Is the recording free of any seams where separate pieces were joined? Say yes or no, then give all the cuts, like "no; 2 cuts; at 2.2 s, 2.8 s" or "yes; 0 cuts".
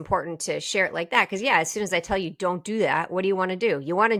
yes; 0 cuts